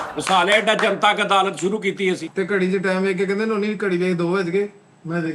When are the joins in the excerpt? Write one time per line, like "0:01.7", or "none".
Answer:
0:02.3